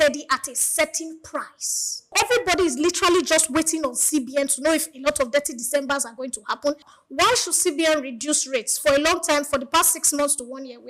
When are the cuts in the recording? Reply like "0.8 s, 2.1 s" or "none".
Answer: 2.1 s, 6.9 s